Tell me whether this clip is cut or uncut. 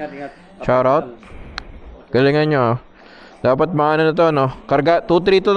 uncut